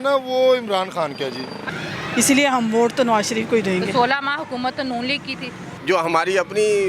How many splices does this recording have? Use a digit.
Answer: 2